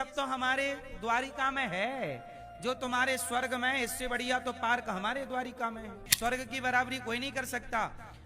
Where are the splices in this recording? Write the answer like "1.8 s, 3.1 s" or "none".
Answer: 6.0 s